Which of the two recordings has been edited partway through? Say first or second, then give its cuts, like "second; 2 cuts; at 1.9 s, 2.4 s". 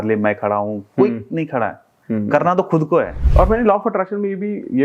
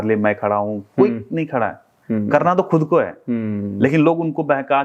first; 1 cut; at 3.2 s